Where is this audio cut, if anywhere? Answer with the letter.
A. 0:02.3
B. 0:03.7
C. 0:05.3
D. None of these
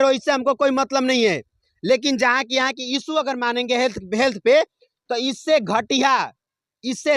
D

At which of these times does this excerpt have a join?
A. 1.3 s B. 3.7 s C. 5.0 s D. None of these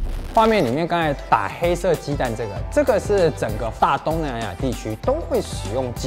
B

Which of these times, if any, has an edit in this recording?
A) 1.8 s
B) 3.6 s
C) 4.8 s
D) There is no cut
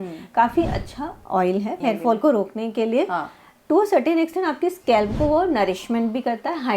A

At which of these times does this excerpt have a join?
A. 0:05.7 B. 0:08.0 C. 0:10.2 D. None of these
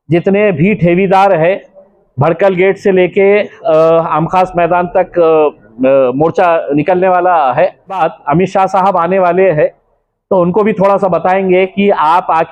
B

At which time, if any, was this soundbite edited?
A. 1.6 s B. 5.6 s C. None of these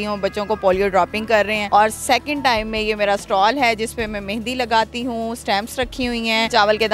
A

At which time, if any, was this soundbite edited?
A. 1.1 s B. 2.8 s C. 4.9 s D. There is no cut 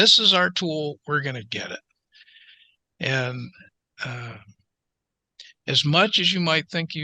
D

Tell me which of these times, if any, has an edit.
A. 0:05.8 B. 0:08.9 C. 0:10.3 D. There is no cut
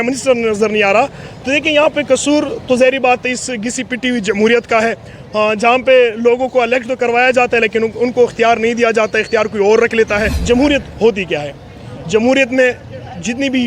C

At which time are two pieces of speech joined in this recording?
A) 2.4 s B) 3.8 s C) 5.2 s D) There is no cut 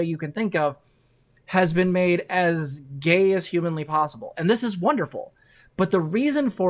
D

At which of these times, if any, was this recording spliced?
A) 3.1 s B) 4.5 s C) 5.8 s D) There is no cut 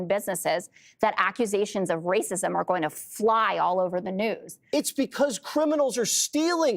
B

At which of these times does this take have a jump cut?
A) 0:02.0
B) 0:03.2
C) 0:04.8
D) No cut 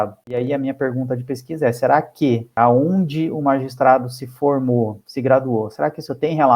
D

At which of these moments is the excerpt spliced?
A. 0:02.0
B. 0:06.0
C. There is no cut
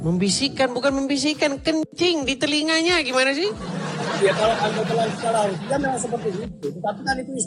C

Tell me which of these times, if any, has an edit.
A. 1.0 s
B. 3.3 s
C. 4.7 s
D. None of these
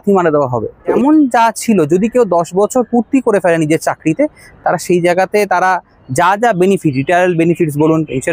A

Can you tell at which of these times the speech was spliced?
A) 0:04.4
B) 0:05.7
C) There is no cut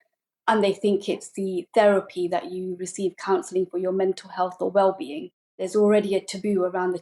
B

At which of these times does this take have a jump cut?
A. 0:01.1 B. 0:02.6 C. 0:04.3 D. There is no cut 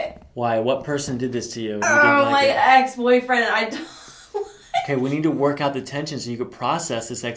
D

